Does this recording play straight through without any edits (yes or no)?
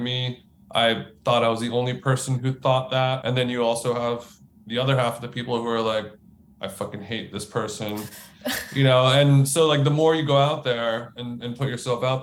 no